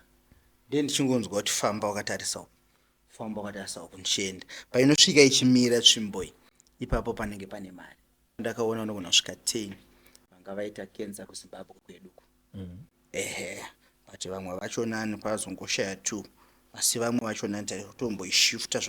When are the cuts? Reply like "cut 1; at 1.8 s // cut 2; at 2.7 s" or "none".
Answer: cut 1; at 8.4 s